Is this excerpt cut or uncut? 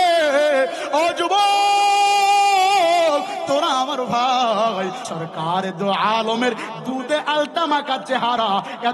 cut